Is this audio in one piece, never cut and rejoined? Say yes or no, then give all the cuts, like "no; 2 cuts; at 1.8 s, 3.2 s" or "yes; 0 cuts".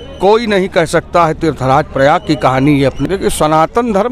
no; 1 cut; at 3.0 s